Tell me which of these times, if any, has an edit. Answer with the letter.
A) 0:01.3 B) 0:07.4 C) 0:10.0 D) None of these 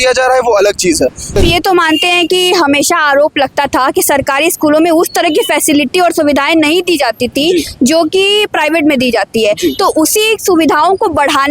A